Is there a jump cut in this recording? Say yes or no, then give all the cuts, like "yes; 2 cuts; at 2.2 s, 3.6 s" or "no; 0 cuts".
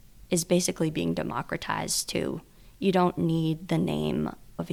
no; 0 cuts